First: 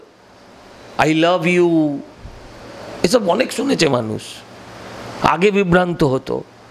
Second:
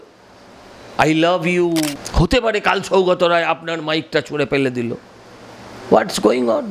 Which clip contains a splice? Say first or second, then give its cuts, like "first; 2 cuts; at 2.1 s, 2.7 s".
second; 1 cut; at 2.0 s